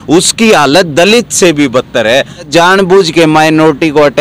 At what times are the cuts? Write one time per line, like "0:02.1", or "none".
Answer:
0:02.5